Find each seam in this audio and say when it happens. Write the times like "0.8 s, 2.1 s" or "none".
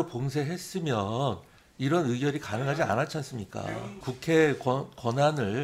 4.0 s